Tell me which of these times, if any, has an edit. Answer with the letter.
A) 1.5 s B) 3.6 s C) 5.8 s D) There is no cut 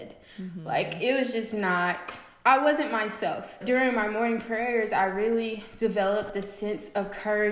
B